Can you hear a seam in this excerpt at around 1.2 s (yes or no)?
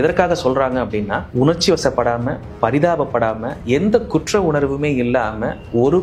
yes